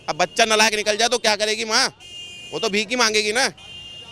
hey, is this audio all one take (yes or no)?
yes